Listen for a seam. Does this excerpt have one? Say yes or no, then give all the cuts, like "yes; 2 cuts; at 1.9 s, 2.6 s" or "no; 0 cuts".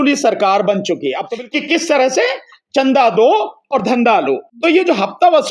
yes; 2 cuts; at 1.3 s, 4.5 s